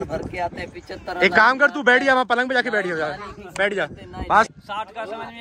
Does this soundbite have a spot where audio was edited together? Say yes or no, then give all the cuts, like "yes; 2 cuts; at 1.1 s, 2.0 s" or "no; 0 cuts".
yes; 1 cut; at 4.5 s